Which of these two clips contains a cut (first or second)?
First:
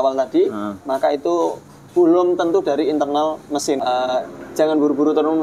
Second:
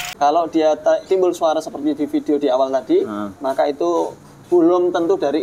first